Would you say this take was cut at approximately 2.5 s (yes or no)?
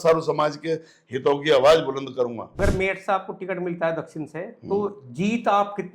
yes